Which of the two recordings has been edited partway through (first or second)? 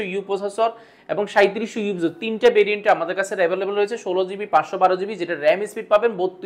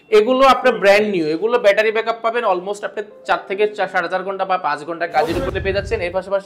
second